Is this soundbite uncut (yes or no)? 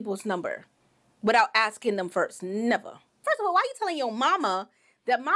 no